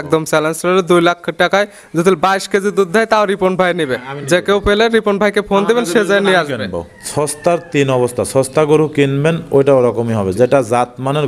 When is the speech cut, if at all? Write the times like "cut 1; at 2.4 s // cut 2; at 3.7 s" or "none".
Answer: cut 1; at 7.0 s